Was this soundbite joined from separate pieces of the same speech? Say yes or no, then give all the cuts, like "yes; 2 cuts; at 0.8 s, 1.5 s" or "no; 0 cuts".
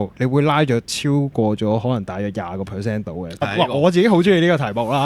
yes; 2 cuts; at 0.9 s, 3.4 s